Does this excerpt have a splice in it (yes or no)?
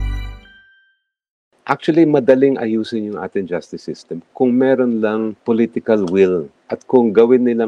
yes